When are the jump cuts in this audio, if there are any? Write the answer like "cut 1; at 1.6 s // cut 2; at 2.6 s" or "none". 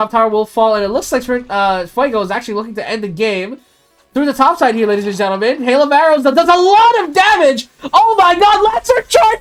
none